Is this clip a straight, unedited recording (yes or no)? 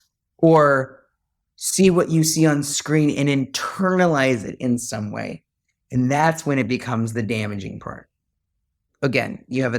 no